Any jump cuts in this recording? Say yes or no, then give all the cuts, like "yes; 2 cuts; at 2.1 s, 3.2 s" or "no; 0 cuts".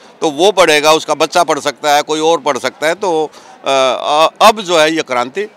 no; 0 cuts